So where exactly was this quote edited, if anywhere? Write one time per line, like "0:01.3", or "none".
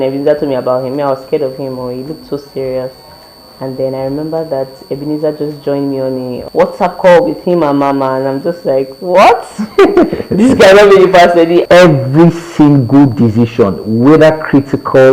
0:06.4
0:11.6